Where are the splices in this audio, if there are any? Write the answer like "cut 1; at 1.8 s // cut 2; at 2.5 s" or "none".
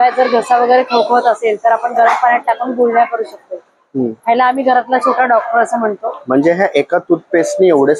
none